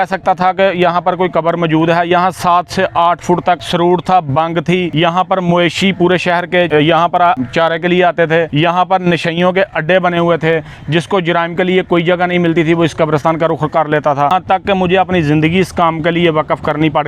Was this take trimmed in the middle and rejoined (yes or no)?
yes